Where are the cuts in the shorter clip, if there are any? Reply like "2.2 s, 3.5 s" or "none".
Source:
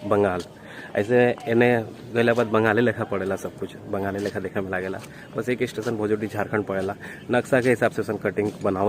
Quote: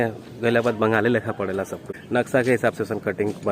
1.9 s